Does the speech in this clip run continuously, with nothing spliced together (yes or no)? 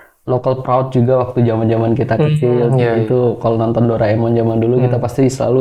yes